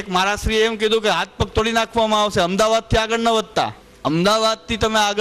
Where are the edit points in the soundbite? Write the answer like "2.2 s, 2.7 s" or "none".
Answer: 3.8 s